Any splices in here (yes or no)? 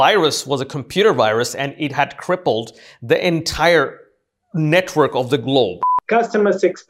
yes